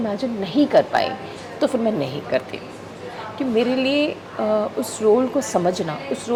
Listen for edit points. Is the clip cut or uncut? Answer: uncut